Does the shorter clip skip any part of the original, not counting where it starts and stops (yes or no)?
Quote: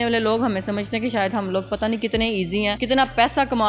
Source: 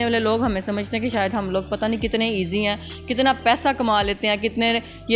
yes